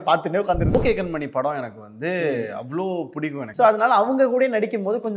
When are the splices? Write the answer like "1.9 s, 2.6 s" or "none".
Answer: 0.8 s, 3.4 s